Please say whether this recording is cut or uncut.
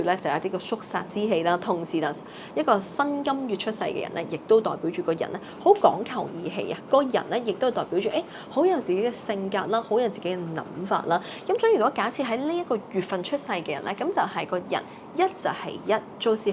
uncut